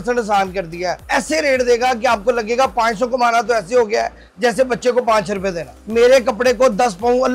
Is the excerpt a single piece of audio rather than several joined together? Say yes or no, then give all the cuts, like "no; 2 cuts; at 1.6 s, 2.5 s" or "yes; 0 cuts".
no; 2 cuts; at 1.0 s, 6.0 s